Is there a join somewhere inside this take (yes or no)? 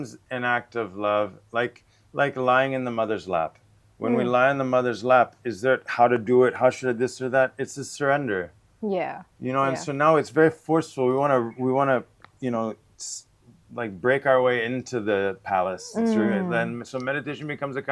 no